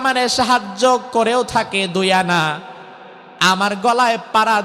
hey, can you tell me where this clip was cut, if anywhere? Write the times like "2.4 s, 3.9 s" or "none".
none